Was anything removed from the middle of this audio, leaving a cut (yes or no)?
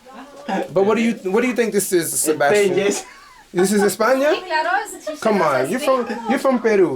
no